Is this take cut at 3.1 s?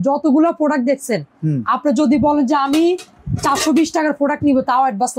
no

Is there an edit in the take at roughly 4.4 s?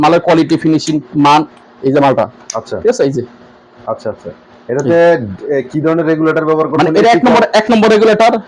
no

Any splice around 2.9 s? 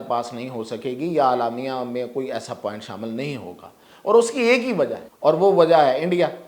no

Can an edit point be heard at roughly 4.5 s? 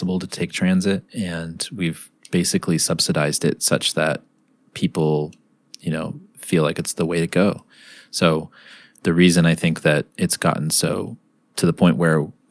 no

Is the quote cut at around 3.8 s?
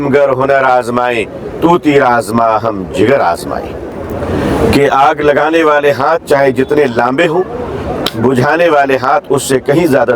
yes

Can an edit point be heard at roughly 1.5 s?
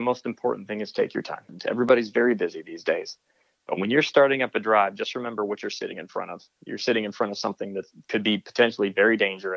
yes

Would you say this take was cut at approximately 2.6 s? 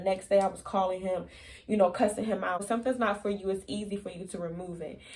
yes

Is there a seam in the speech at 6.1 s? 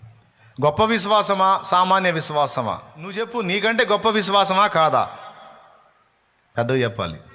no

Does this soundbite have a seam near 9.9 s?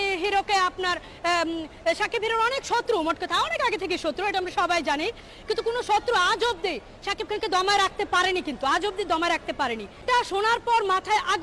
yes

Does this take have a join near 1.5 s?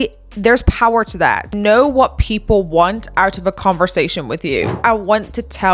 yes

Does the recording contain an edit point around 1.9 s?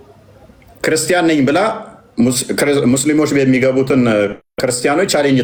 no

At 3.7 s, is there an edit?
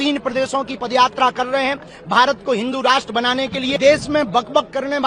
yes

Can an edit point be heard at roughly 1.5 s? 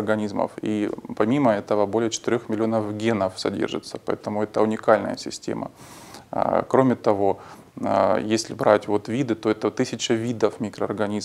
no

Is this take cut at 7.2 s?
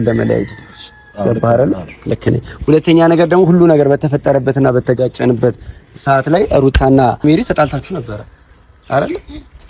yes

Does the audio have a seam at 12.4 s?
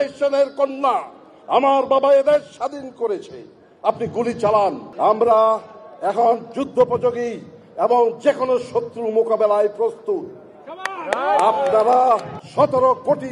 yes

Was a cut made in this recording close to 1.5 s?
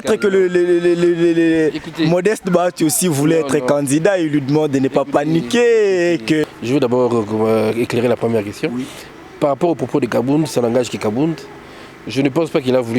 no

